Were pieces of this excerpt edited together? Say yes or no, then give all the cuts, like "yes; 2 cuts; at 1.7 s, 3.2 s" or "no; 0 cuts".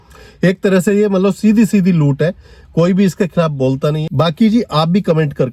yes; 1 cut; at 4.0 s